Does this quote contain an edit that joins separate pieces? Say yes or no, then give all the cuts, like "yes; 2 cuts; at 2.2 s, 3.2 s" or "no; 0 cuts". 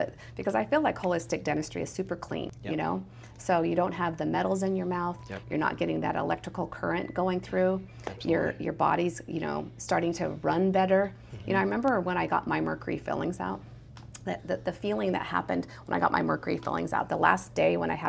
yes; 1 cut; at 2.5 s